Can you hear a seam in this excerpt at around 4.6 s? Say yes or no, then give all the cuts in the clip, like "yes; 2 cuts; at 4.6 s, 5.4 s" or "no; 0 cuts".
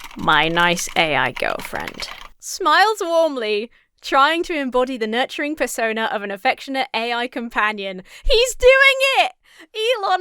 no; 0 cuts